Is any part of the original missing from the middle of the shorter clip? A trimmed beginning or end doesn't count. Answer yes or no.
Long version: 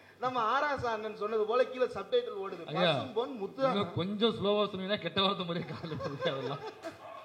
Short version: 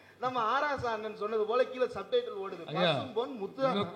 no